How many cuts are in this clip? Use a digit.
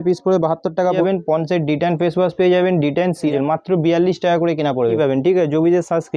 3